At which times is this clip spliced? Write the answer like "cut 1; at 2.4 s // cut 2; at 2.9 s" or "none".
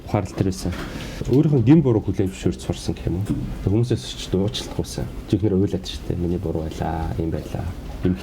cut 1; at 1.2 s // cut 2; at 5.2 s